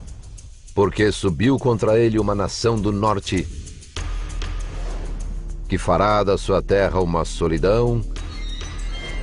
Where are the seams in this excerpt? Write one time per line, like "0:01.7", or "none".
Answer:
0:04.7